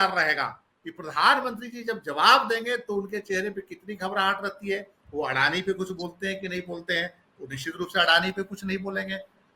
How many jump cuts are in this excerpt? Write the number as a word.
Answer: zero